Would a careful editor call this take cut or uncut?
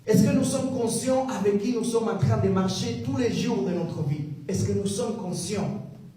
cut